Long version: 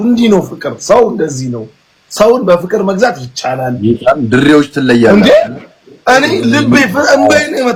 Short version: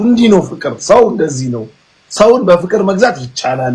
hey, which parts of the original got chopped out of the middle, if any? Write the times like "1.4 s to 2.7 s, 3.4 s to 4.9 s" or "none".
none

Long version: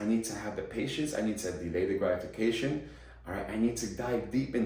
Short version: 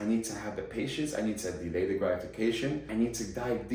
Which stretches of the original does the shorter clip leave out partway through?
2.9 s to 3.5 s

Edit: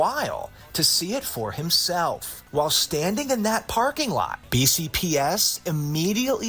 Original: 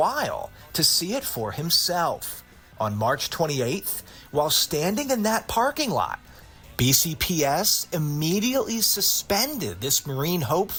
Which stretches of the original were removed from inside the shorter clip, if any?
2.3 s to 4.1 s, 6.2 s to 6.7 s

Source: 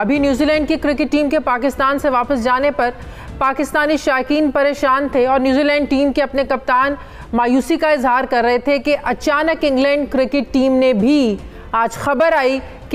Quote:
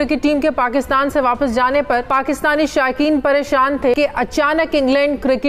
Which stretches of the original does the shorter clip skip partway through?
3.0 s to 3.4 s, 5.3 s to 8.8 s

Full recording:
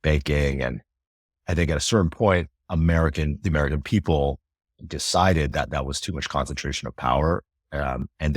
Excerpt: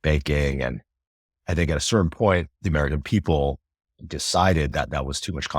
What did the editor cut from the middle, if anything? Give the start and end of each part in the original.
2.6 s to 3.4 s

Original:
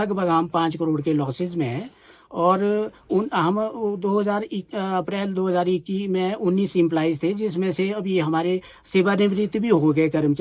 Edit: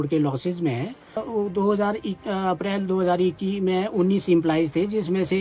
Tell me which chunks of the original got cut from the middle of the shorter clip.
2.2 s to 3.7 s

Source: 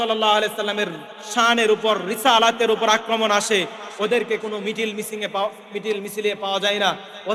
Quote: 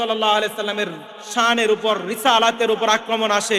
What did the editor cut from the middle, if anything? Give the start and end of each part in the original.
none

